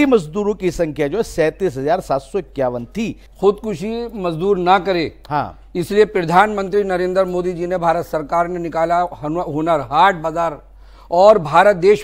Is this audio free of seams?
no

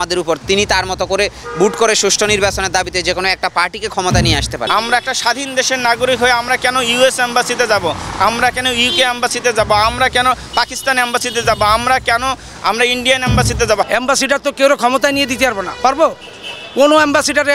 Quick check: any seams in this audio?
yes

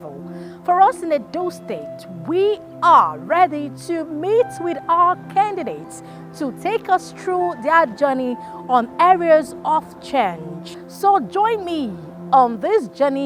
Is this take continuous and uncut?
yes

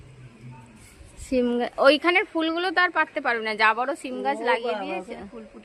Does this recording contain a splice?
no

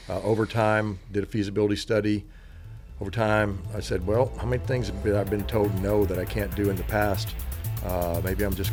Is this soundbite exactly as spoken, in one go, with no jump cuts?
yes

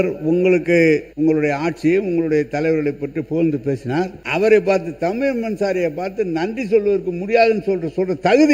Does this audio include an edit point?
yes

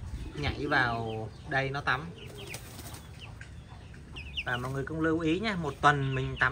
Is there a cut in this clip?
yes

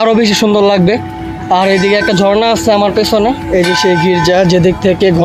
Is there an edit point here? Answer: yes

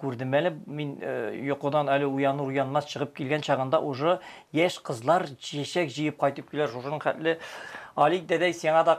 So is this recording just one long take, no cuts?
yes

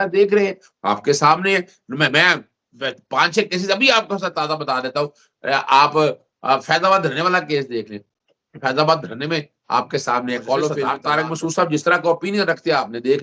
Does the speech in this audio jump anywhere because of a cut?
yes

